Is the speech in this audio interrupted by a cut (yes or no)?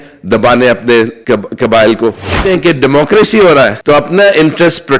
yes